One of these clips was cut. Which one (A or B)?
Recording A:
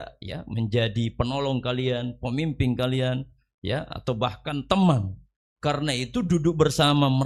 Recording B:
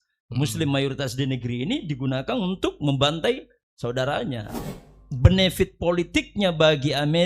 B